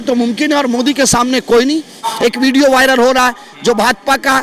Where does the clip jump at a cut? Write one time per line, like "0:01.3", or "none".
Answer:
0:02.1